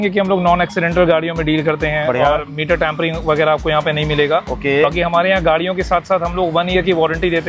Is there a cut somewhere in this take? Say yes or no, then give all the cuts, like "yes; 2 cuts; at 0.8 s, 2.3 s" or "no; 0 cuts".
no; 0 cuts